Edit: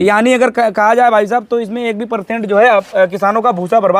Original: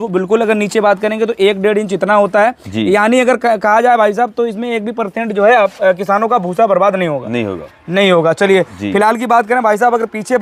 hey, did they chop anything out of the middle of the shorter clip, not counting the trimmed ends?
no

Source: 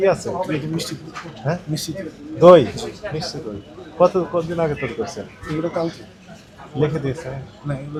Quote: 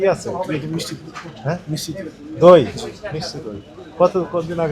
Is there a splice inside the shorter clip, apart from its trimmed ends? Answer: no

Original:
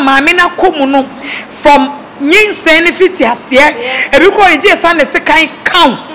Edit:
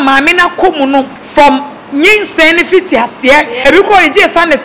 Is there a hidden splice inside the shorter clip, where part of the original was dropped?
yes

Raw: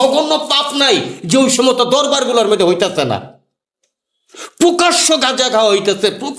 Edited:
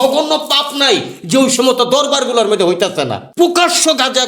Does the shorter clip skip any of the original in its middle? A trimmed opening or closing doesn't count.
yes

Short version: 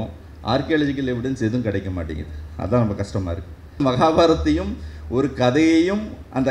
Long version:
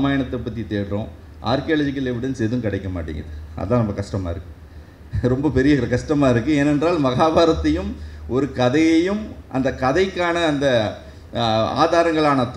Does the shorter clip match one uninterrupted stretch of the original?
no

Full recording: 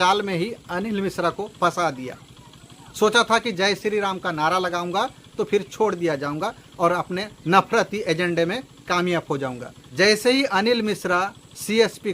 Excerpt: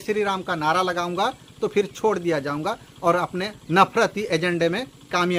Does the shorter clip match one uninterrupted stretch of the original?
yes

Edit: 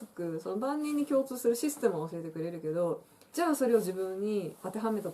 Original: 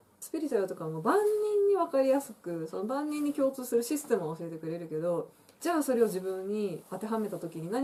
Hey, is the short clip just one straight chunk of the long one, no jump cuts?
yes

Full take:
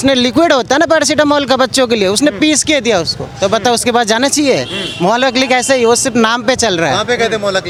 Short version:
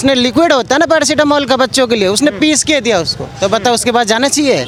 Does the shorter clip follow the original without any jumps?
yes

